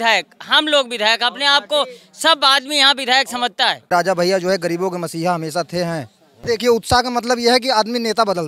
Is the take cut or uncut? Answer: cut